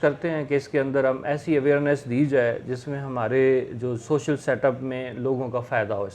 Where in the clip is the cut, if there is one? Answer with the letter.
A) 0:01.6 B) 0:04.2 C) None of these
C